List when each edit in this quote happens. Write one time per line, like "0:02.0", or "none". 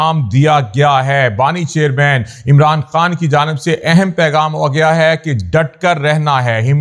none